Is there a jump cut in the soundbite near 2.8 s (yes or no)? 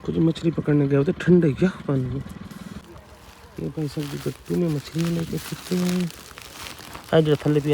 yes